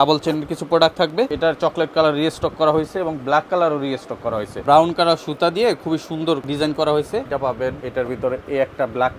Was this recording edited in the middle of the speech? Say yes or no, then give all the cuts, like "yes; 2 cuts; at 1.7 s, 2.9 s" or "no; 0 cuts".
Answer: yes; 4 cuts; at 1.3 s, 4.6 s, 6.5 s, 7.7 s